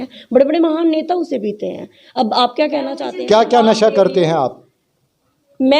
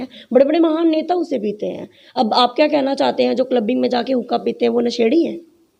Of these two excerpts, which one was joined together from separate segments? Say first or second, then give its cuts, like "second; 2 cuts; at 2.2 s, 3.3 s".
first; 1 cut; at 3.0 s